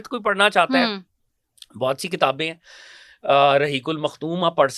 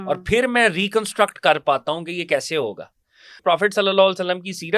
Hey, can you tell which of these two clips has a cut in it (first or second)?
second